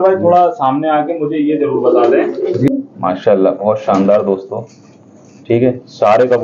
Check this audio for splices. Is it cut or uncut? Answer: cut